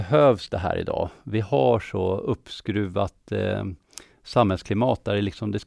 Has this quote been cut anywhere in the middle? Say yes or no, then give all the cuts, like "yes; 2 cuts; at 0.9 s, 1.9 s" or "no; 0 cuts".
no; 0 cuts